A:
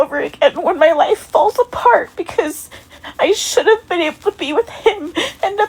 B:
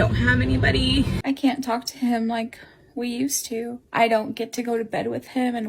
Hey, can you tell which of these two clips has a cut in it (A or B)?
B